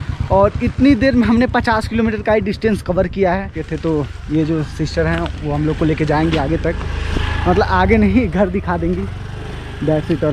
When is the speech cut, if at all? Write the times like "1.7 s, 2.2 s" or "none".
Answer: 3.6 s